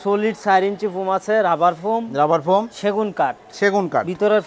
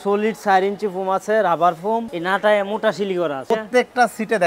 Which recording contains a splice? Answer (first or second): second